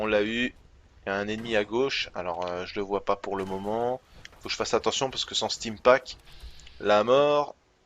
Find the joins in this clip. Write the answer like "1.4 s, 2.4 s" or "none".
2.0 s